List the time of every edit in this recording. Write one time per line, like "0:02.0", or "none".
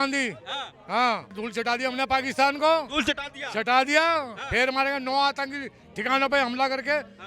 0:01.4